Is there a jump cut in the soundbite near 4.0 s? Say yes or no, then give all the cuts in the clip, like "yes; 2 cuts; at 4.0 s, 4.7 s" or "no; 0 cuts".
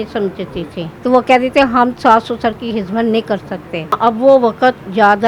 yes; 2 cuts; at 0.9 s, 4.0 s